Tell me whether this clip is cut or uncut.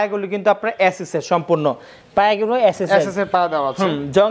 uncut